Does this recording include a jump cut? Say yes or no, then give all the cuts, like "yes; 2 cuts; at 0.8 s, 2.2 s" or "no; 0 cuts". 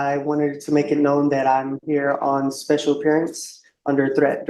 no; 0 cuts